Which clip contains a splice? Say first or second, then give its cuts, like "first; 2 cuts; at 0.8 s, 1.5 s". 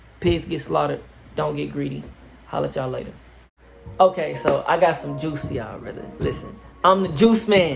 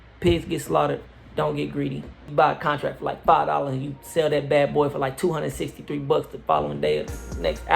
second; 1 cut; at 2.3 s